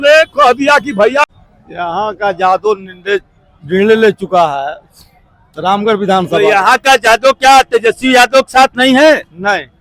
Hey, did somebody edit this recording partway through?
yes; 1 cut; at 1.2 s

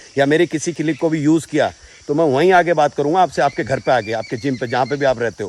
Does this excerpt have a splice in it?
no; 0 cuts

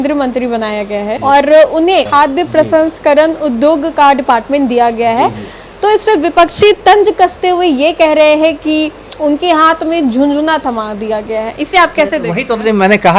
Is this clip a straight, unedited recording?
yes; 0 cuts

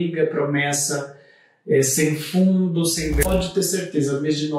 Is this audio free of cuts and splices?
no; 1 cut; at 3.1 s

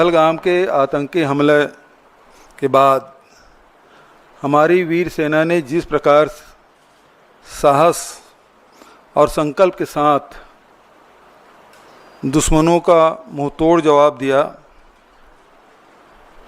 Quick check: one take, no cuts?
no; 1 cut; at 1.3 s

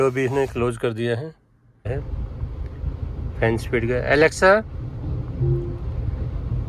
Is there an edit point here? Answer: yes; 1 cut; at 1.9 s

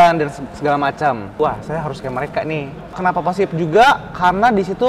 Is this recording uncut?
no; 2 cuts; at 1.4 s, 3.0 s

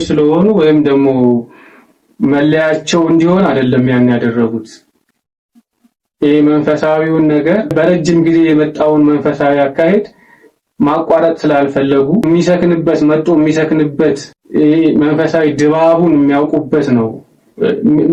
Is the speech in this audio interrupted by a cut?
no; 0 cuts

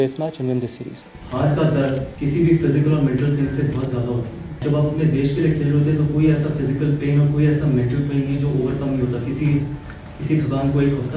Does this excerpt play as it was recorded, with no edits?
no; 3 cuts; at 1.0 s, 2.1 s, 4.6 s

